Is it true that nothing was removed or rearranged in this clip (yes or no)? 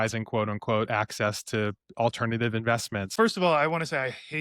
no